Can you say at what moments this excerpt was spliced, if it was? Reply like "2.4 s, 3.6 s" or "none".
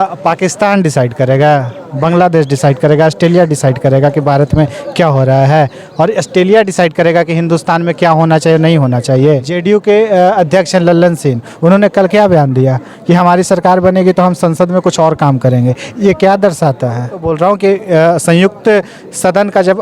9.5 s, 17.3 s